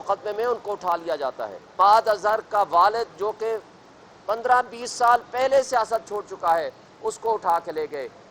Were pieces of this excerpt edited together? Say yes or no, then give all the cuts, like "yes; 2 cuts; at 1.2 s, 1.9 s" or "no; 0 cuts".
yes; 1 cut; at 1.7 s